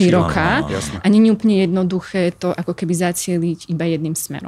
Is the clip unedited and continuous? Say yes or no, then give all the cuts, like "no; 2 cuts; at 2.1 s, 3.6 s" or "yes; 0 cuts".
yes; 0 cuts